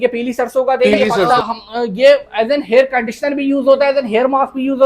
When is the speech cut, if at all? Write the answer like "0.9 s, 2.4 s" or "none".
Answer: 1.4 s